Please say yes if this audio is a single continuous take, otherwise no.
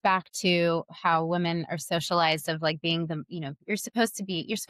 yes